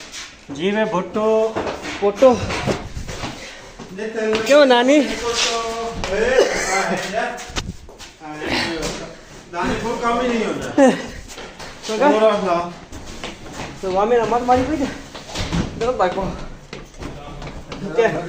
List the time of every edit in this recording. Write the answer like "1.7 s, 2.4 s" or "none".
none